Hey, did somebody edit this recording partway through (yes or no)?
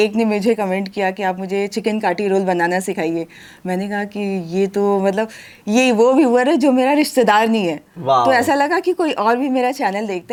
no